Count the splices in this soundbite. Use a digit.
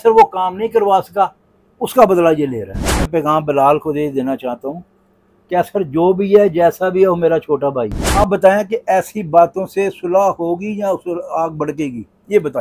2